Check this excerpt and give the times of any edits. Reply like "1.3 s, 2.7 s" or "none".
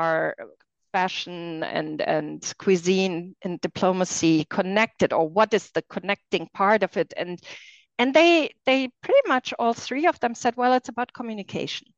none